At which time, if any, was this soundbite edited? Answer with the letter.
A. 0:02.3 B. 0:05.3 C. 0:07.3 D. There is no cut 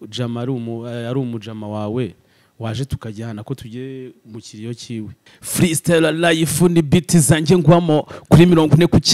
B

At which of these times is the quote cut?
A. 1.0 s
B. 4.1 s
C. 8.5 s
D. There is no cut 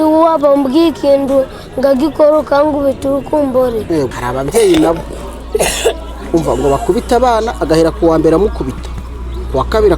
B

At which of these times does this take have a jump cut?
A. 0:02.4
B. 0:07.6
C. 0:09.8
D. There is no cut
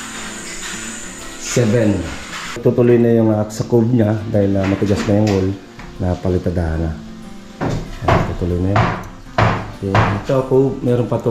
A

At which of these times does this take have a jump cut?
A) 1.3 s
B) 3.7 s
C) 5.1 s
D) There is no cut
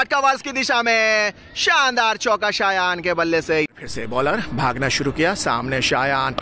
B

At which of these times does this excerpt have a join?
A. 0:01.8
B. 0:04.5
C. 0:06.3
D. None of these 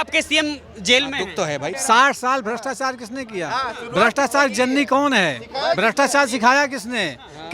A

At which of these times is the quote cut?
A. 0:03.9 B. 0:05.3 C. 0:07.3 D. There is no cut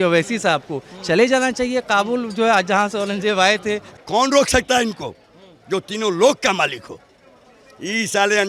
A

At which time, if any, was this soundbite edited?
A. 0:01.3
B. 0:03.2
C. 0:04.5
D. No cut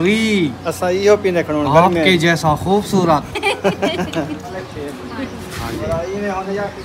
C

